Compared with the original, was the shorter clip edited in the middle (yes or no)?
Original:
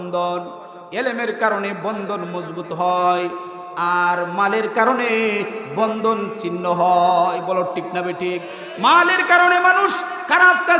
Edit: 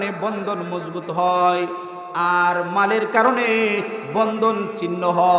no